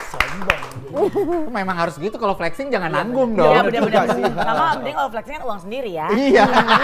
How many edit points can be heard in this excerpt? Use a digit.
0